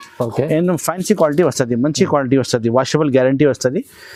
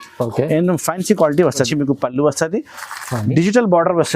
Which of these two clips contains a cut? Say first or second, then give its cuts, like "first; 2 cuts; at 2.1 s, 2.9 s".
second; 1 cut; at 1.7 s